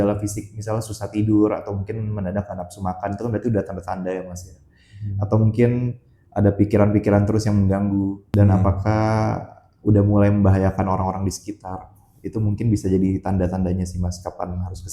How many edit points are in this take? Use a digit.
1